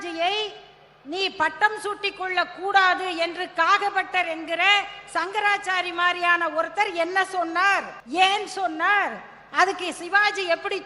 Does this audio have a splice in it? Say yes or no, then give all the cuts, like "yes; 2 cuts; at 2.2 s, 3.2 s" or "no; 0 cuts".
yes; 1 cut; at 8.0 s